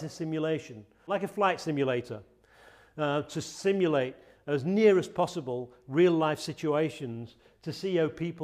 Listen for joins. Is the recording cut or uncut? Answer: cut